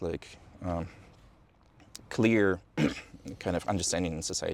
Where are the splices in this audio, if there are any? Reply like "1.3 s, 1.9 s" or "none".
none